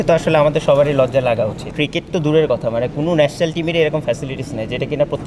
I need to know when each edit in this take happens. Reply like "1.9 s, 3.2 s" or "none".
1.7 s